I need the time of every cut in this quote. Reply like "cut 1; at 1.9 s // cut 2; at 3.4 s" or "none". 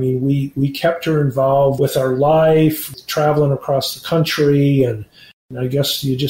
cut 1; at 1.8 s // cut 2; at 3.0 s // cut 3; at 5.5 s